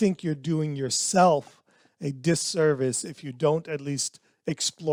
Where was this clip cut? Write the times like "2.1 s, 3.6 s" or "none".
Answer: none